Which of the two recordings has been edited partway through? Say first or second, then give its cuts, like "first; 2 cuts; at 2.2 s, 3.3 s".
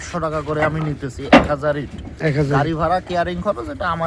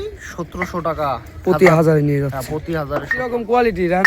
second; 1 cut; at 3.1 s